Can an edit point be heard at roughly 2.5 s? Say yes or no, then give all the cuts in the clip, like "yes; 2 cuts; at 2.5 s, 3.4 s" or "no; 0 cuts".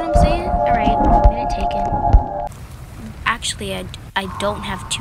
yes; 1 cut; at 2.5 s